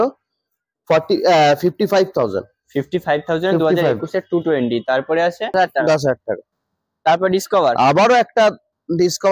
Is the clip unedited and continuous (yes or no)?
no